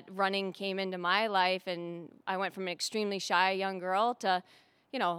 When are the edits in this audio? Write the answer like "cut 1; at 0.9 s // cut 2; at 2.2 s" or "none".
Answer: none